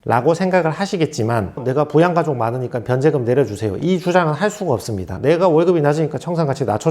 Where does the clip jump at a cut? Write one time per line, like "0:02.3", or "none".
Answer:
0:01.5
0:05.1